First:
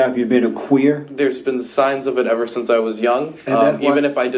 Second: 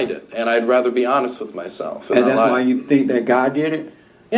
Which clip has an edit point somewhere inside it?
first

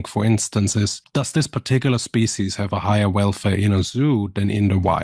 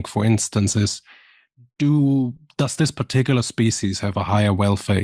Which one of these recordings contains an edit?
first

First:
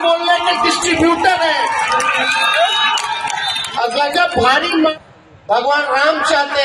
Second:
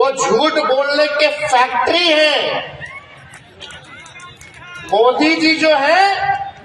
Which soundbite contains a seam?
first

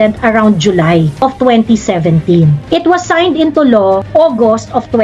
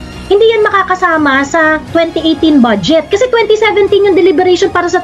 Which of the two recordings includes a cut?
first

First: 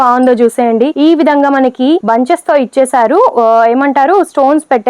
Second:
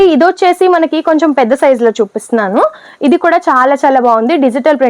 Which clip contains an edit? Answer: first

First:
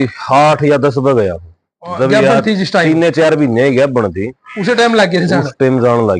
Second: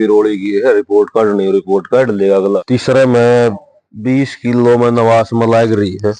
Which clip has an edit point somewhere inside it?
second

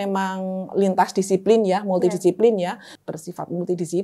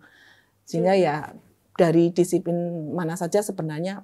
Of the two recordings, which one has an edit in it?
first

